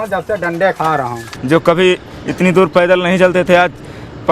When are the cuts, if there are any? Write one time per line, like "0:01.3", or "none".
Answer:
0:01.3